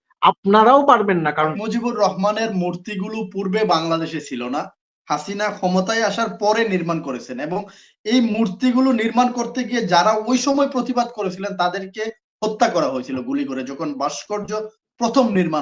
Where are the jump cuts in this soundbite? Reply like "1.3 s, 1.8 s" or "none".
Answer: 1.6 s

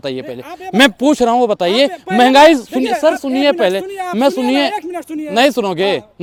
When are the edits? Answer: none

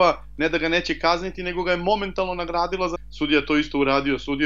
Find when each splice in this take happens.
3.0 s

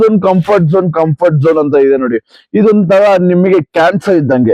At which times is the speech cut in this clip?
none

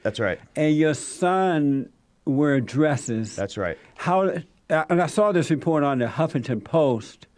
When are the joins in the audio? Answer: none

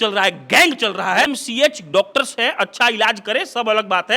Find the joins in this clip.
1.3 s

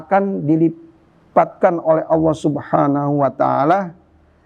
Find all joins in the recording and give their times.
none

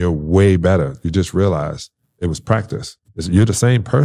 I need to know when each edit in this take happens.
3.1 s

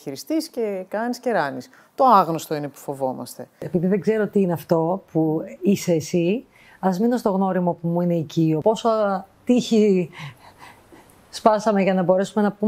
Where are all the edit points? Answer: 3.6 s, 8.6 s

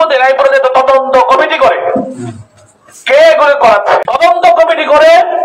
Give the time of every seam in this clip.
4.1 s

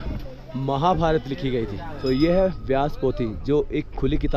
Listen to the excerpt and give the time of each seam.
2.0 s

